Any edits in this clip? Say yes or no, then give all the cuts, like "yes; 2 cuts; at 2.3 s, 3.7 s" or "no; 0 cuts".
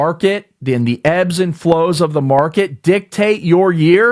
no; 0 cuts